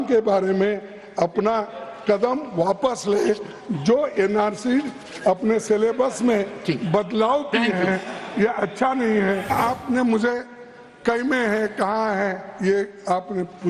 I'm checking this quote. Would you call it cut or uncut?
cut